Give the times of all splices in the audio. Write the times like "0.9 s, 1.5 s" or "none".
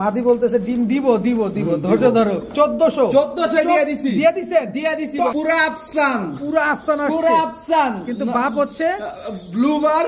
2.5 s, 5.3 s